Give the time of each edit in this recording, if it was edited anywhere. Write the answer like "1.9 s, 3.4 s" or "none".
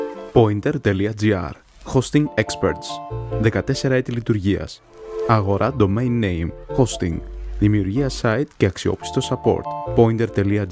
none